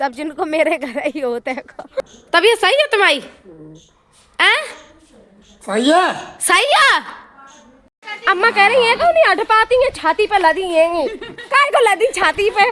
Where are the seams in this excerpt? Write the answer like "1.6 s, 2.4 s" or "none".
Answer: 1.8 s, 8.0 s